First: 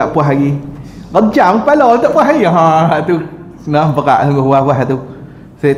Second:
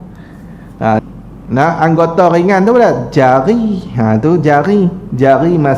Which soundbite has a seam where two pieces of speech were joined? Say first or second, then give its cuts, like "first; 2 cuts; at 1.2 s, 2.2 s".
second; 1 cut; at 1.0 s